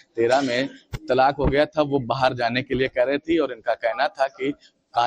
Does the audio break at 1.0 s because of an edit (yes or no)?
no